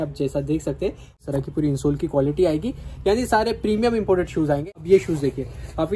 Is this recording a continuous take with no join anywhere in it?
no; 2 cuts; at 1.2 s, 4.7 s

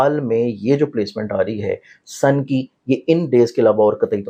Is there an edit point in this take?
no; 0 cuts

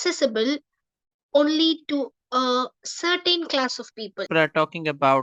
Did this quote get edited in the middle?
yes; 1 cut; at 4.2 s

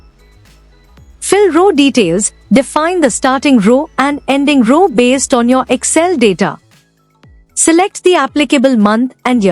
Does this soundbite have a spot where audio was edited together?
yes; 1 cut; at 1.3 s

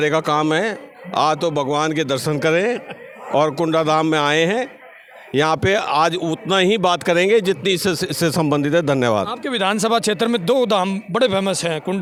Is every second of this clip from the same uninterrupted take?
yes; 0 cuts

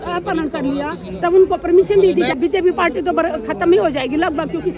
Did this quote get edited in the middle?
yes; 1 cut; at 2.4 s

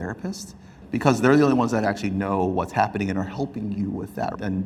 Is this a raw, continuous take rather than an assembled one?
yes; 0 cuts

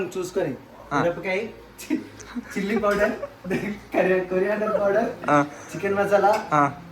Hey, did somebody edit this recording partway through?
no; 0 cuts

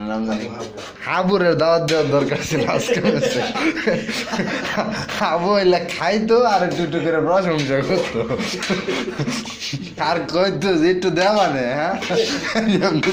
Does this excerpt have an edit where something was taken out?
no; 0 cuts

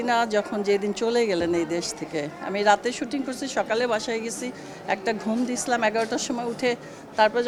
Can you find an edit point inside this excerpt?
no; 0 cuts

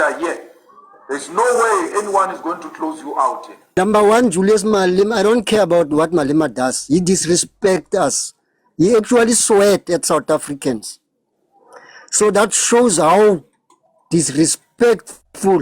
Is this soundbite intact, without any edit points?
no; 1 cut; at 3.6 s

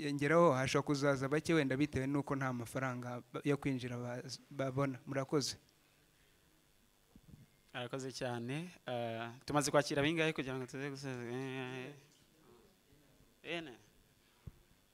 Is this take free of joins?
yes; 0 cuts

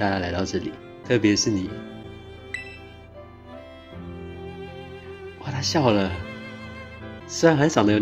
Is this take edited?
no; 0 cuts

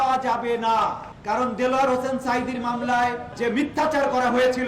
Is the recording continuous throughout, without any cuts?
no; 2 cuts; at 1.1 s, 3.3 s

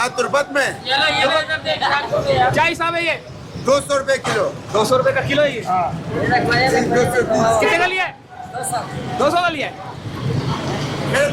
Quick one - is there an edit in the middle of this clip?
no; 0 cuts

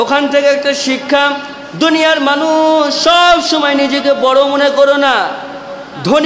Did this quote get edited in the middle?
no; 0 cuts

